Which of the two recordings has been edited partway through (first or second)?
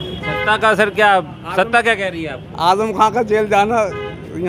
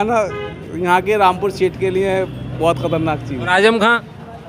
second